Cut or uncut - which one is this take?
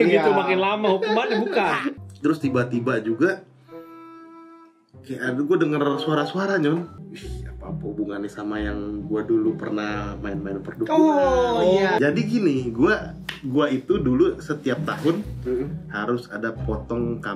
cut